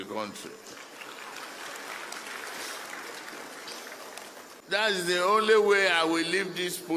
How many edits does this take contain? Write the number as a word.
one